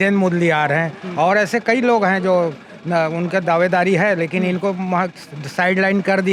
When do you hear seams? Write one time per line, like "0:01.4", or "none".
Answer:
none